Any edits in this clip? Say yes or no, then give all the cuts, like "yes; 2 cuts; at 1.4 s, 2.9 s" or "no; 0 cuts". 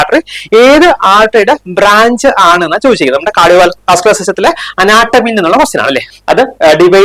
yes; 1 cut; at 6.1 s